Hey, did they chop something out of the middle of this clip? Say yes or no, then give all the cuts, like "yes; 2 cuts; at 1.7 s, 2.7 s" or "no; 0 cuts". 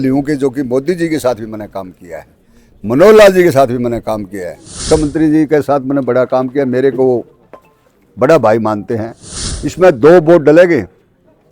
yes; 2 cuts; at 4.8 s, 9.5 s